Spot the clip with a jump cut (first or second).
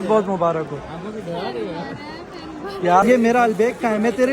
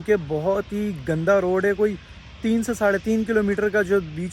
first